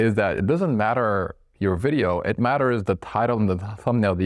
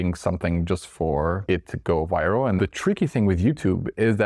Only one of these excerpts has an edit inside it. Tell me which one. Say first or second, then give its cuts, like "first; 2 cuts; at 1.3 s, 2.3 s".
second; 2 cuts; at 1.4 s, 2.6 s